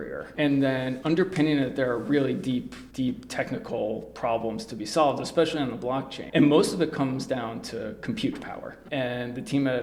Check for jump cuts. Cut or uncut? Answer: cut